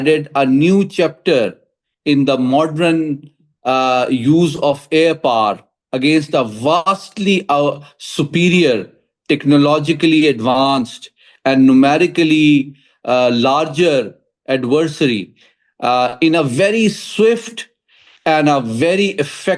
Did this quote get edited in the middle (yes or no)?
no